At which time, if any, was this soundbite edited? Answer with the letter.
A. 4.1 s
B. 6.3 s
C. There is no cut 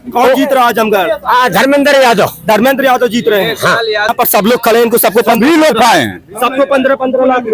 A